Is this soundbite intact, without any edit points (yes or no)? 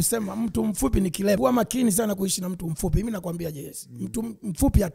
no